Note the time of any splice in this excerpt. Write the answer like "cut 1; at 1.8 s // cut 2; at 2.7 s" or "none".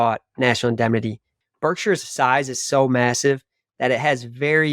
cut 1; at 1.3 s

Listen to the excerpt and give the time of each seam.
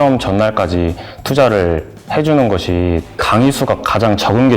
cut 1; at 3.1 s

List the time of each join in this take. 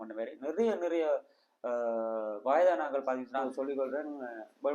cut 1; at 3.5 s

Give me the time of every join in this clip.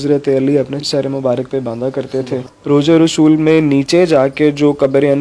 cut 1; at 0.8 s // cut 2; at 2.5 s

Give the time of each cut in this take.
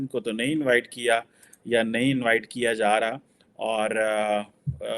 none

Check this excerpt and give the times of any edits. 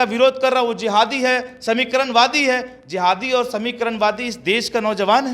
none

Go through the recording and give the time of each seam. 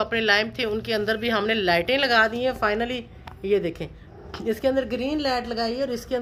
none

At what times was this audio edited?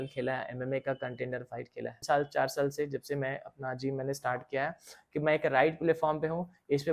cut 1; at 2.0 s

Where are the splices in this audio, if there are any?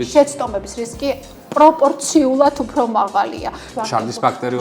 cut 1; at 3.7 s

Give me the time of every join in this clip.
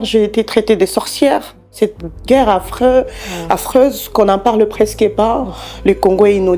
cut 1; at 1.7 s

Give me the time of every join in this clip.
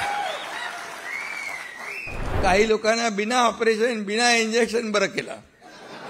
cut 1; at 2.3 s

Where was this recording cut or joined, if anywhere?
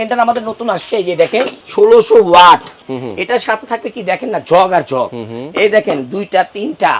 cut 1; at 1.6 s // cut 2; at 2.8 s

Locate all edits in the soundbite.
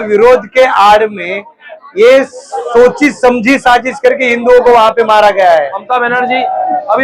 cut 1; at 5.8 s

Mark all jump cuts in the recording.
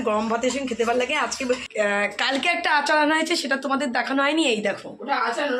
cut 1; at 1.6 s

